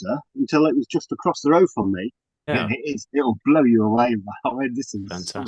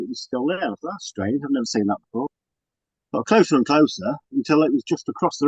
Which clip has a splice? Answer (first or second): first